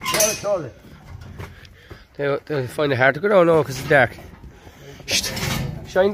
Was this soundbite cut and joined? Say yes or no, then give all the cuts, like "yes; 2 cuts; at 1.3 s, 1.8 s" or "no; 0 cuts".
no; 0 cuts